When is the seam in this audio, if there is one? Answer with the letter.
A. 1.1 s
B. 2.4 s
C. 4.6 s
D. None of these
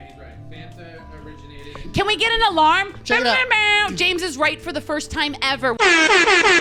D